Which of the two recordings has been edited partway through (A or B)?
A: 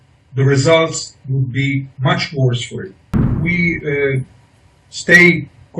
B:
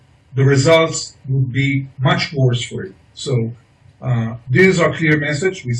A